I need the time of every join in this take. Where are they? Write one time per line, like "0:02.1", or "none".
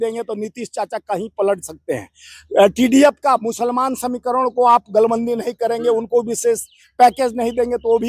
none